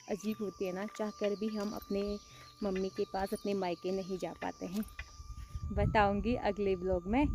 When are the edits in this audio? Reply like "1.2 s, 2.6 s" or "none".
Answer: 5.5 s